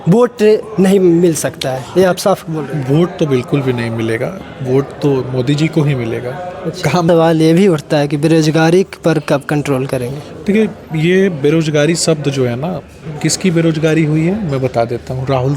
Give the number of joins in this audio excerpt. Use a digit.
1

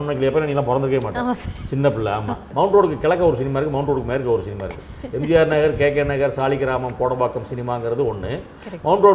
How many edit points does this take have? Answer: 1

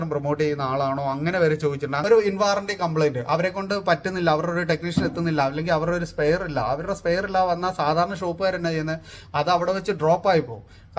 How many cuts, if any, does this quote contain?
1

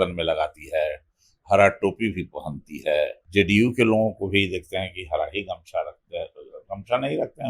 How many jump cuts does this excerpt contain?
1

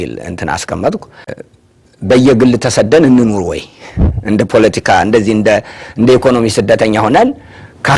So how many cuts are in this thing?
1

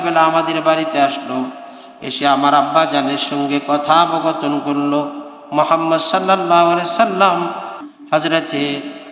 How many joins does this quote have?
1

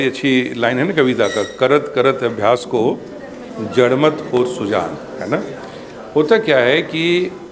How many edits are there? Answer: 0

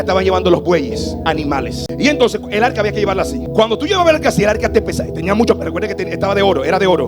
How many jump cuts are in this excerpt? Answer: 2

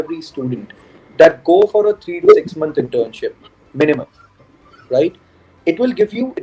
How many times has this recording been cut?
0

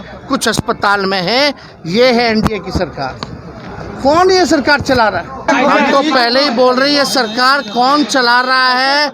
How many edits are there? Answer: 1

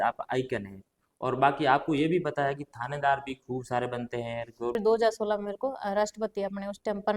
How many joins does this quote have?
1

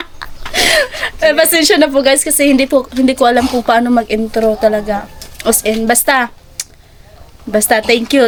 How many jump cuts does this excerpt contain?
0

